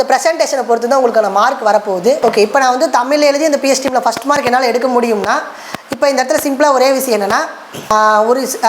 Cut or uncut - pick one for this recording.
cut